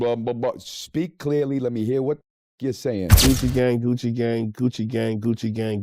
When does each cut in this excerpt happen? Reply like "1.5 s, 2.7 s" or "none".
3.2 s